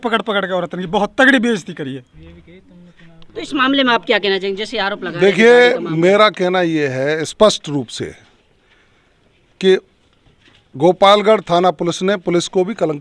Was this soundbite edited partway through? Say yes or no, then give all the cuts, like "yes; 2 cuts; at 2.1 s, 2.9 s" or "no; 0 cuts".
no; 0 cuts